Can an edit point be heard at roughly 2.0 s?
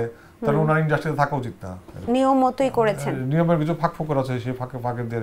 yes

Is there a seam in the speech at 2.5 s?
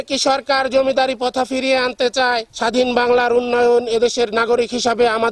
yes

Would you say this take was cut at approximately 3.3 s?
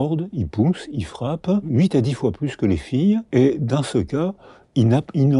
yes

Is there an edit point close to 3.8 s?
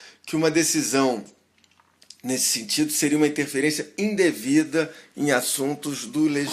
no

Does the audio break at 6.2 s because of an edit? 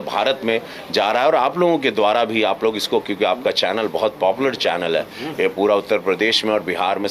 no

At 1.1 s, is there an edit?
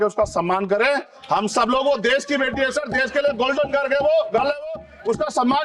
no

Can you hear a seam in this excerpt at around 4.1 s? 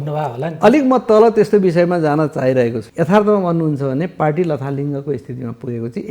no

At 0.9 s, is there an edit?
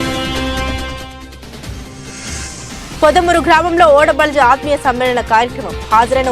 no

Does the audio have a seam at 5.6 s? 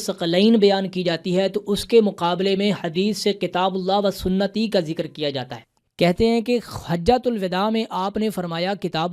yes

